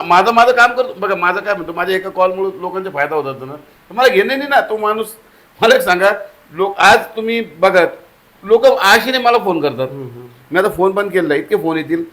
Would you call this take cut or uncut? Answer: uncut